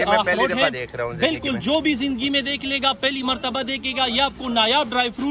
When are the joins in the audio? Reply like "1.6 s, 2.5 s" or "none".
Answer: none